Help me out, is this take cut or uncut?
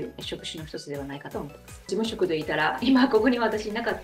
cut